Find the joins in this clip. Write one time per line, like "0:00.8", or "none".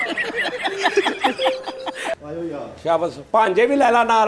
0:02.2